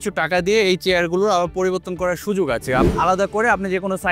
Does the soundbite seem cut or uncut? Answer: cut